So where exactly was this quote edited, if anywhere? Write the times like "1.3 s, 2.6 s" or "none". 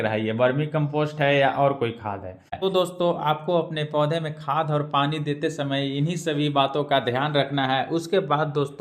2.5 s